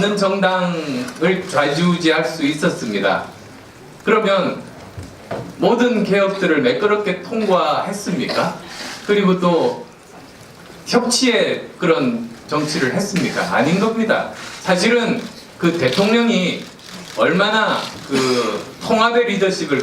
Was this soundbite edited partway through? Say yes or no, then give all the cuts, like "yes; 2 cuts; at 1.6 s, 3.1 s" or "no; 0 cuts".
yes; 1 cut; at 10.9 s